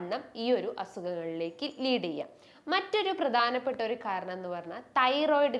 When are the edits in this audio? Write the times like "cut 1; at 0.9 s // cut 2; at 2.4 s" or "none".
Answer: none